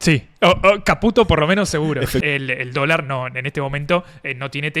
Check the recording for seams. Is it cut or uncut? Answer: cut